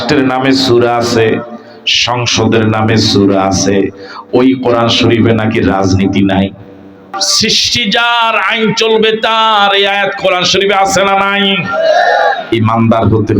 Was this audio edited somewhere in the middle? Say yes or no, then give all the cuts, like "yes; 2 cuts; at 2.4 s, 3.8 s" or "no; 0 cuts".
yes; 1 cut; at 7.1 s